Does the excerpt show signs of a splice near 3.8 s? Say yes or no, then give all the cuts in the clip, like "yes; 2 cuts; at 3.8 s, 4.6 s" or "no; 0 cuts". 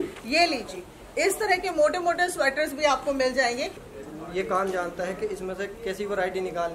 yes; 1 cut; at 3.8 s